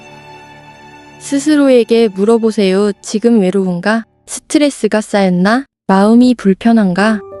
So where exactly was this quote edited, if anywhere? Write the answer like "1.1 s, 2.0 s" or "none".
1.3 s